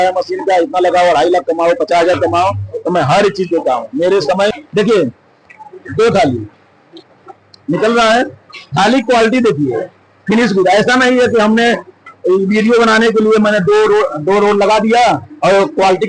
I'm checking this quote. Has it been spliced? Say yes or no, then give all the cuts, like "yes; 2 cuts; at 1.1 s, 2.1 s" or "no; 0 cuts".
yes; 1 cut; at 4.5 s